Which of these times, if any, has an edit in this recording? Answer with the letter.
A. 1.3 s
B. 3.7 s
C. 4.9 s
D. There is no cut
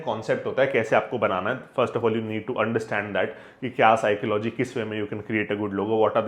D